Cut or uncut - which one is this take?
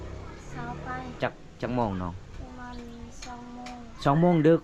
cut